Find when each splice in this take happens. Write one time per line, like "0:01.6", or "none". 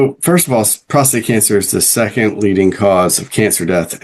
none